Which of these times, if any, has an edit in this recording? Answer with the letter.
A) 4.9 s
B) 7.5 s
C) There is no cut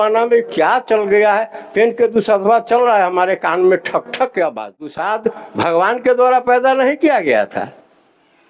C